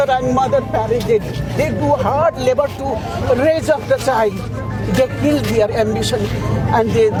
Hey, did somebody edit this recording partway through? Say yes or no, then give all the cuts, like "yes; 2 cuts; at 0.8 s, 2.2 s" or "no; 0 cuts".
no; 0 cuts